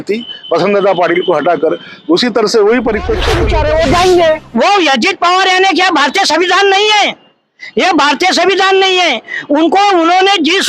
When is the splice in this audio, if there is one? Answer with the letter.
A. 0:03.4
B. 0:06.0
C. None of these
A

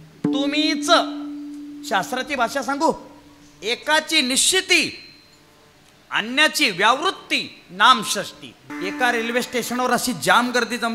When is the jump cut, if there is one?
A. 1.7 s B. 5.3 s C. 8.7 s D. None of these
C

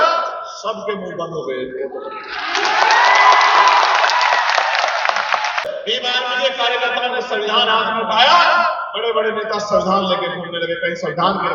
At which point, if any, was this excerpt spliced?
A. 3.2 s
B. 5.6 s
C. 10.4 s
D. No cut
B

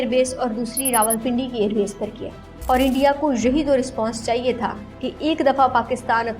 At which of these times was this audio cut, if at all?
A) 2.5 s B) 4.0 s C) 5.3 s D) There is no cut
A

